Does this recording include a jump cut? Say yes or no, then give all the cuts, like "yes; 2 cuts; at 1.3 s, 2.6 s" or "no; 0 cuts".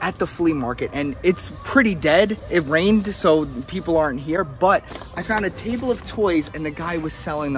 no; 0 cuts